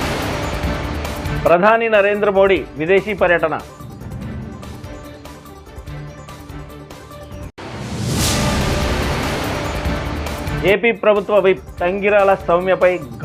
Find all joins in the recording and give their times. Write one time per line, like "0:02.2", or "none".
none